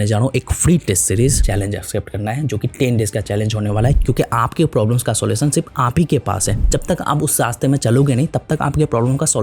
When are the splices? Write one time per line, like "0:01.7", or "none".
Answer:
0:01.4
0:04.0
0:06.6